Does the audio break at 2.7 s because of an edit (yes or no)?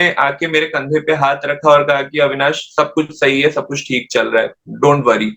no